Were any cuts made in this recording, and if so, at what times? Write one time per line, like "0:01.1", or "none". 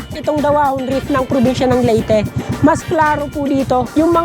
none